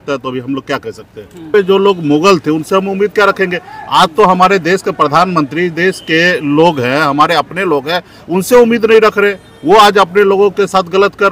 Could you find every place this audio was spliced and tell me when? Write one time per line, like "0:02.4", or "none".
0:01.5

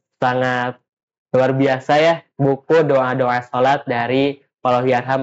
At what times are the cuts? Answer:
none

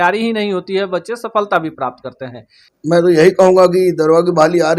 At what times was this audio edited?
0:02.7

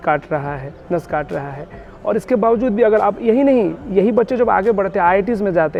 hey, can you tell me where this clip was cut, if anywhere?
none

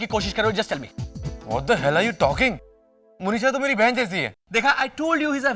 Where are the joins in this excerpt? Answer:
0:04.4

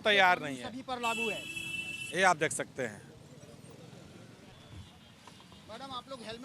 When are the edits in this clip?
0:04.5

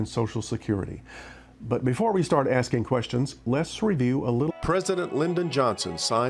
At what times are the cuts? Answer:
none

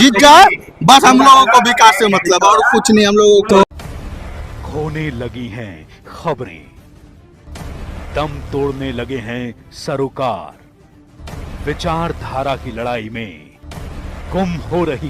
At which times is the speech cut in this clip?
0:03.6

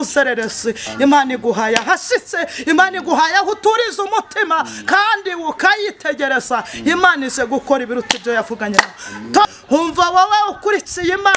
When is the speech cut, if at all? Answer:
0:09.5

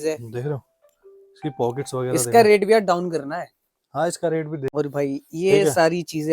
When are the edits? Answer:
0:04.6

